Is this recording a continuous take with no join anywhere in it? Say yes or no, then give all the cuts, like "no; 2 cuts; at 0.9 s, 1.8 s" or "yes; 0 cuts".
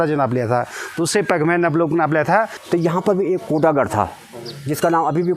no; 1 cut; at 2.6 s